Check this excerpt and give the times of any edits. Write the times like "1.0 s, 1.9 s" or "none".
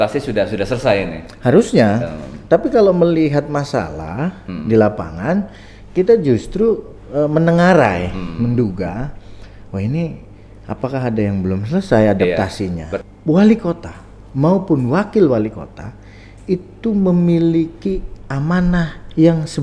12.9 s